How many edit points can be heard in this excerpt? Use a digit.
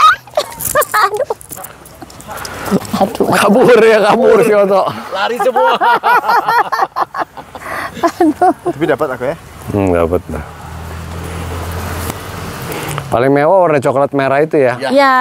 0